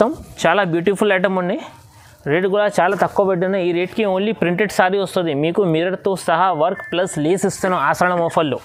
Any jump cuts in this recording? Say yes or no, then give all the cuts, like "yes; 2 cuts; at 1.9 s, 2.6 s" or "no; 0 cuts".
no; 0 cuts